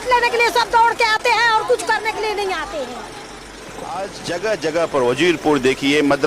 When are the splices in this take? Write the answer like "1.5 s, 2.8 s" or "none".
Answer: 3.1 s